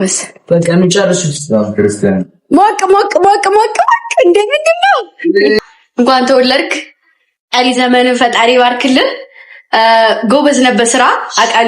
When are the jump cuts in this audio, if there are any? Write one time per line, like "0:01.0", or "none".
0:05.6